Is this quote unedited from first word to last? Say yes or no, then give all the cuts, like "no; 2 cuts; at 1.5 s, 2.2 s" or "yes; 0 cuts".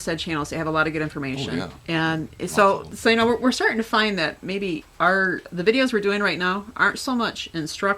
no; 2 cuts; at 2.9 s, 5.1 s